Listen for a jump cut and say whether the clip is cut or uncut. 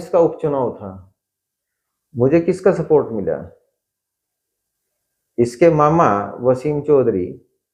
uncut